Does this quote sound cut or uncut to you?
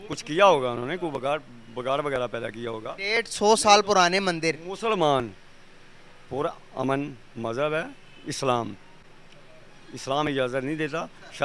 uncut